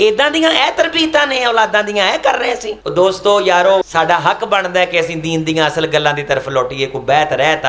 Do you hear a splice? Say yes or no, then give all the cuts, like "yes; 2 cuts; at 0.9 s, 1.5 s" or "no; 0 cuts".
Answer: yes; 2 cuts; at 2.8 s, 3.8 s